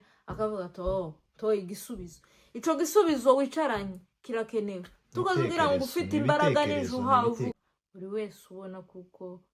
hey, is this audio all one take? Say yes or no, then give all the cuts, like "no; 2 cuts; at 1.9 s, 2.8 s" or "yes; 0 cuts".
no; 1 cut; at 7.6 s